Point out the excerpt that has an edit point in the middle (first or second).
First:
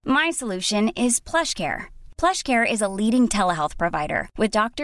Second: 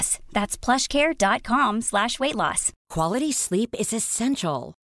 second